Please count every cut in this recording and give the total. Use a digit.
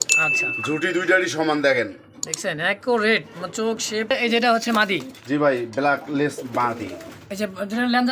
1